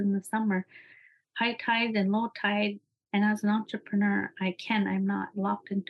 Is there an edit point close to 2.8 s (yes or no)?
yes